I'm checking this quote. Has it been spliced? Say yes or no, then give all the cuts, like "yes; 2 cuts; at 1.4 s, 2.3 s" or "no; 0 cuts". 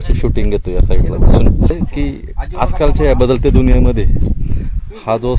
yes; 1 cut; at 1.7 s